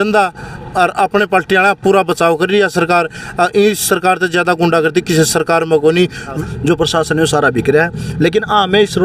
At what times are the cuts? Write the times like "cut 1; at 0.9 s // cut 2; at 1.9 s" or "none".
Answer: cut 1; at 6.3 s